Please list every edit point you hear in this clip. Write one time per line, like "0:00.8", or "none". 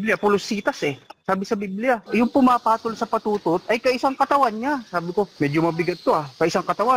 0:02.0
0:05.3

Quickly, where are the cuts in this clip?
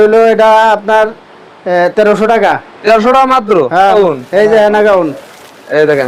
0:03.9

